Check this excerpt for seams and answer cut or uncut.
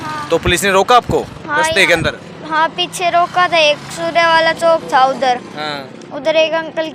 uncut